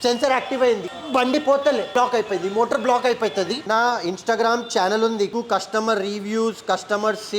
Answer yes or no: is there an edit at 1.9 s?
yes